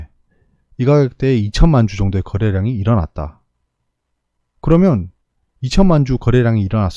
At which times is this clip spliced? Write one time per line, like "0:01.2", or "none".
none